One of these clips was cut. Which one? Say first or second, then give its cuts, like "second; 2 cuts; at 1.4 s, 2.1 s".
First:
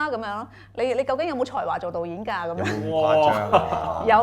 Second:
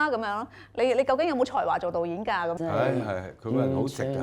second; 1 cut; at 2.5 s